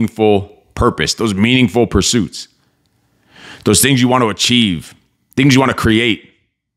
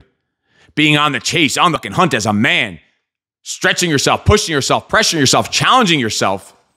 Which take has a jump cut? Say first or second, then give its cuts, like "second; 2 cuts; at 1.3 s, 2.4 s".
second; 1 cut; at 1.8 s